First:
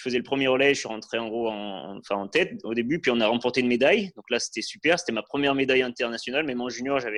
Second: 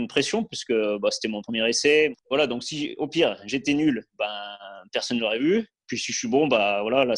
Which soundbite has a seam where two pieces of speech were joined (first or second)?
second